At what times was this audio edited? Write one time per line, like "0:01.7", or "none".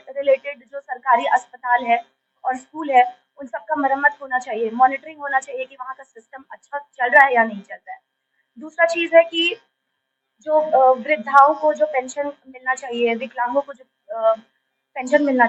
none